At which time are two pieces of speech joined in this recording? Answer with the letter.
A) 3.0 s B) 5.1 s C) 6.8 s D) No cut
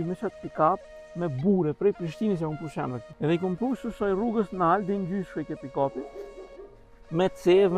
A